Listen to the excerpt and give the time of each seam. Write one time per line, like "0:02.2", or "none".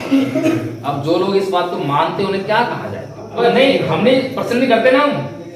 0:03.4